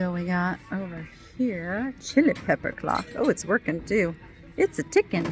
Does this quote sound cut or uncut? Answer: uncut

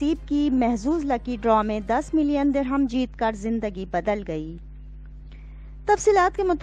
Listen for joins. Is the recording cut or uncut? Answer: uncut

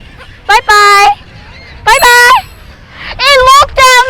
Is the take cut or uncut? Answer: uncut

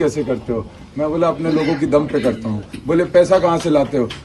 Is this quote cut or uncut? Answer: uncut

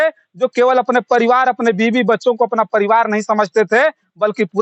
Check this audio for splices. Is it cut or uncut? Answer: uncut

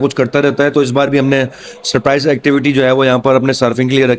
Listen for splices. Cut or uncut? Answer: uncut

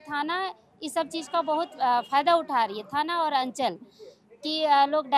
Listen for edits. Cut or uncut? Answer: uncut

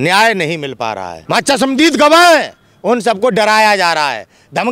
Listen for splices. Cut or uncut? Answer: cut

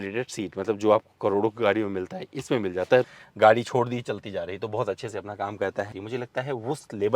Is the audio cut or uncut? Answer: cut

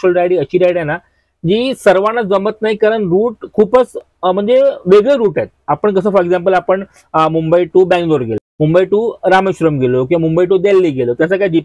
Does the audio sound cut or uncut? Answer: uncut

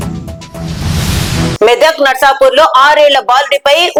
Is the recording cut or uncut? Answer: uncut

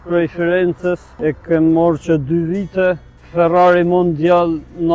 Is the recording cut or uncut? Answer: cut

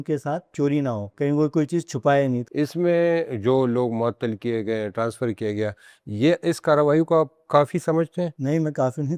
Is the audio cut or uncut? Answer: cut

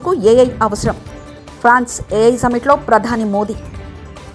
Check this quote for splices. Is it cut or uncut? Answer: uncut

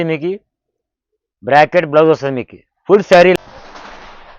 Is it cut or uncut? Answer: cut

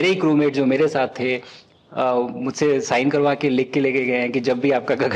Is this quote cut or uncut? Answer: uncut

